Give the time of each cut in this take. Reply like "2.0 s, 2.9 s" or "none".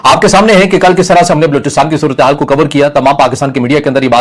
none